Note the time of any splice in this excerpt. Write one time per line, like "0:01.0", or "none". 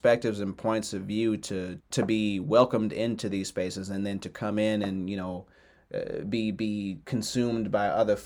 none